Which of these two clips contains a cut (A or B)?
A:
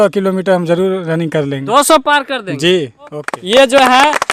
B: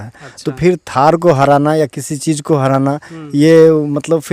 A